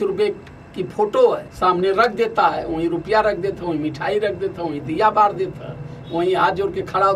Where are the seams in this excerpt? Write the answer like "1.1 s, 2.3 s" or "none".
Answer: 1.5 s